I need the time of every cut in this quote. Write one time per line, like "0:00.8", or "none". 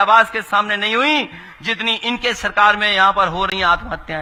none

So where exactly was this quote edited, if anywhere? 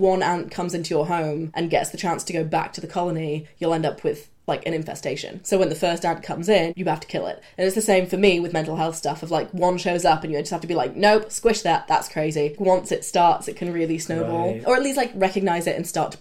0:01.5
0:05.4
0:06.7
0:12.5
0:14.6

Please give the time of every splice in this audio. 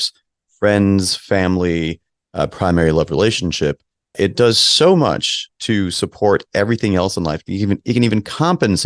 none

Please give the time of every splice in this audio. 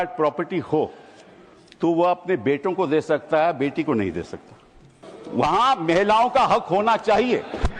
0:04.9

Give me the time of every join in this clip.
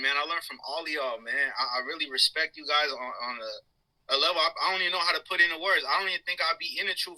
0:01.9

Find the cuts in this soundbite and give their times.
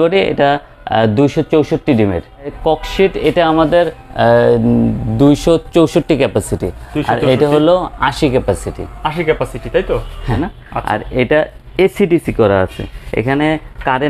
0:02.6
0:10.4

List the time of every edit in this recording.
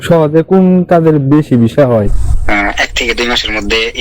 0:02.2

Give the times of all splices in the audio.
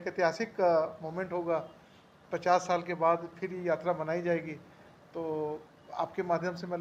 none

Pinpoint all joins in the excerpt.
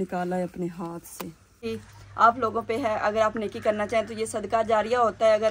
0:01.6

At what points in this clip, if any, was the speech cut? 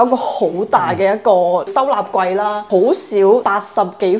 0:01.7
0:02.6
0:03.5

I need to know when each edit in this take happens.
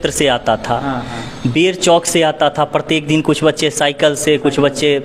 none

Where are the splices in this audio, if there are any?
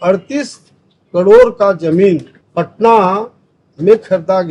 0:02.4

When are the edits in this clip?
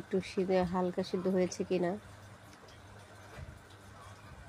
0:03.3

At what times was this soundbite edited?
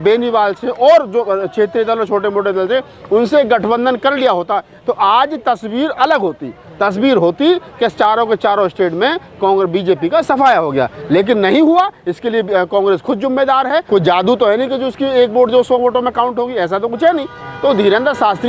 0:13.8

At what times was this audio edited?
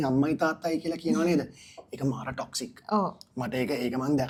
none

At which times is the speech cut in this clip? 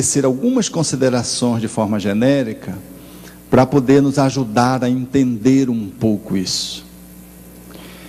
none

